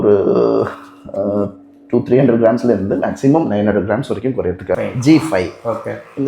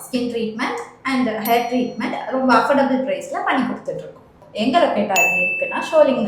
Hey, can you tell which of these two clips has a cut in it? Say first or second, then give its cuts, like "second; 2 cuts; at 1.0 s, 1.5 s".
first; 1 cut; at 4.8 s